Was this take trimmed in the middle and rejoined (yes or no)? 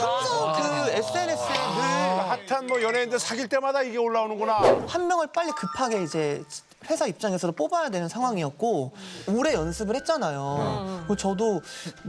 yes